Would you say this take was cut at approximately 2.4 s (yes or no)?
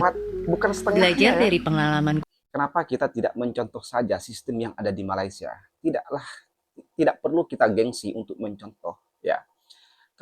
yes